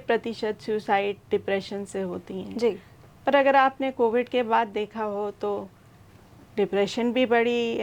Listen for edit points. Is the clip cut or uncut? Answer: uncut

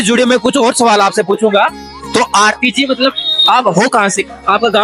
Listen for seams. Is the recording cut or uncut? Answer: uncut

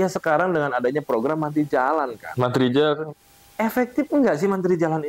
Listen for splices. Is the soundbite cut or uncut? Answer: uncut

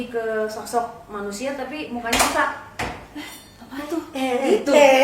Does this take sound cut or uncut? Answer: cut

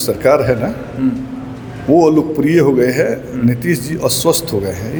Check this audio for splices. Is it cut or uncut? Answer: uncut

